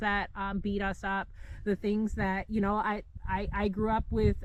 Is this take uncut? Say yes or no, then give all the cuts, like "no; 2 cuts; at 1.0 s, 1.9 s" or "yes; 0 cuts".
yes; 0 cuts